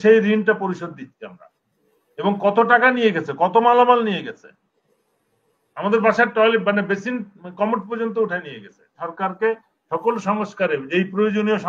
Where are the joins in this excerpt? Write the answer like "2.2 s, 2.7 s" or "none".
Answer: 9.0 s